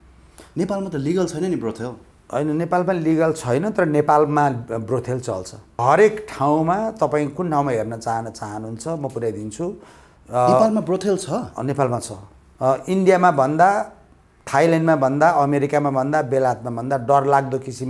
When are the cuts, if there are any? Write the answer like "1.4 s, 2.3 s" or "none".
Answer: 5.7 s, 12.4 s